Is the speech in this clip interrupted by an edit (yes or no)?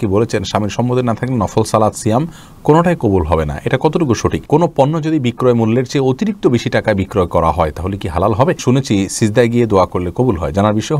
yes